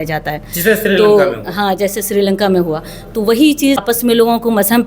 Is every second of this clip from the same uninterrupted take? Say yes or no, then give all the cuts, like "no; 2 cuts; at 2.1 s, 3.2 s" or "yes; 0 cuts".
no; 1 cut; at 3.8 s